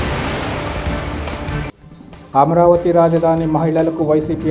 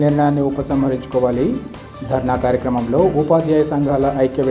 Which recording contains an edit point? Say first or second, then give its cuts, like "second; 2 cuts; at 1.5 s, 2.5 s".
first; 1 cut; at 1.6 s